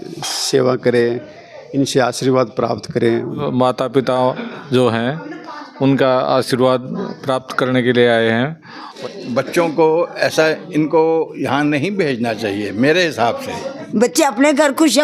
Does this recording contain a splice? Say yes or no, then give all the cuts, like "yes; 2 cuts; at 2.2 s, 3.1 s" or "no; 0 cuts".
yes; 3 cuts; at 3.5 s, 8.9 s, 13.8 s